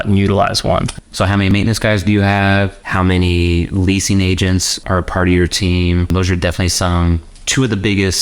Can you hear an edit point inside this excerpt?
yes; 4 cuts; at 1.5 s, 2.8 s, 4.8 s, 6.1 s

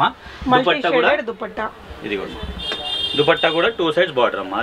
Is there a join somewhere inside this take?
no; 0 cuts

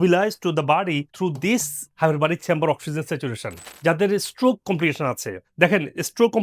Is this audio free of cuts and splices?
no; 1 cut; at 3.7 s

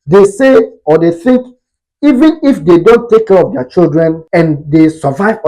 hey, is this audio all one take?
no; 1 cut; at 4.2 s

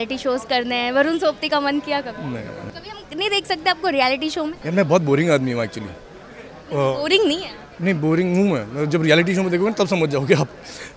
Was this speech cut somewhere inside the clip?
yes; 2 cuts; at 2.7 s, 4.6 s

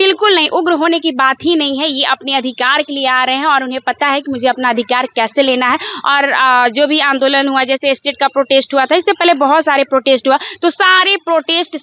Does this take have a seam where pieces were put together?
no; 0 cuts

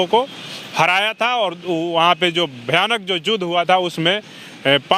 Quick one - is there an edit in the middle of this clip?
no; 0 cuts

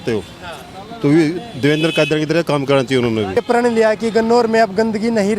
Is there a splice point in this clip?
yes; 1 cut; at 3.4 s

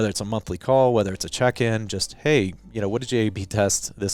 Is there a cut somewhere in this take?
no; 0 cuts

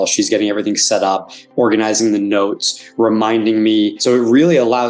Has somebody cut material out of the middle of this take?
yes; 1 cut; at 4.0 s

